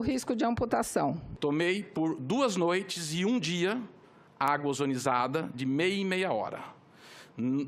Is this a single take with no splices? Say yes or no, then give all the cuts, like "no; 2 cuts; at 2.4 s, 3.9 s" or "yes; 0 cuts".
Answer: no; 1 cut; at 1.3 s